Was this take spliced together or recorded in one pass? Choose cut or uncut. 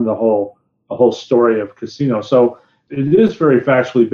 cut